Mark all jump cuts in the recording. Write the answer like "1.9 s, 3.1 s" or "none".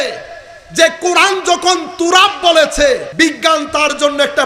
3.1 s